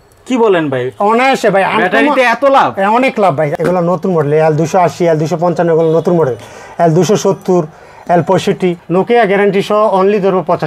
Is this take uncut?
no; 2 cuts; at 3.5 s, 8.8 s

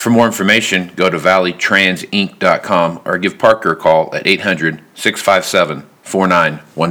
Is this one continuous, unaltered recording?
yes; 0 cuts

